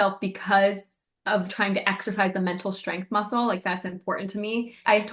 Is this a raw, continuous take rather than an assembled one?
no; 1 cut; at 1.5 s

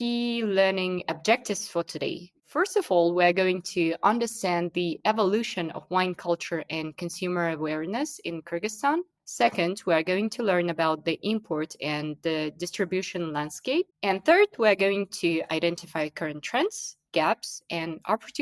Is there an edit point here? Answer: yes; 2 cuts; at 2.5 s, 13.9 s

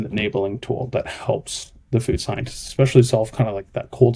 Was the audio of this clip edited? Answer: no; 0 cuts

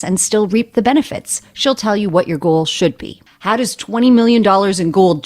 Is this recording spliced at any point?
yes; 1 cut; at 3.1 s

